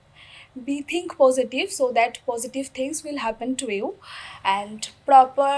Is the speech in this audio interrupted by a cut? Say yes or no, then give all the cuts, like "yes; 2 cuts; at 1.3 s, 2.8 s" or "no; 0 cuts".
no; 0 cuts